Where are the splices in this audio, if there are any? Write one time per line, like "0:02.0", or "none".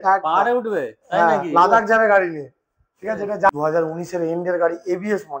0:03.5